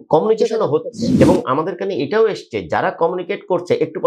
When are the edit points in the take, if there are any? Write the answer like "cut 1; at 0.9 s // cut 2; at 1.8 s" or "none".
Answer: cut 1; at 1.0 s